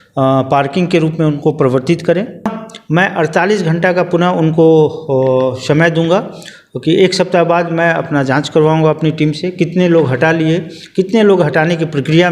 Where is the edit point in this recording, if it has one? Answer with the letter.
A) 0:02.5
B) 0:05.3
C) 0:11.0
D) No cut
A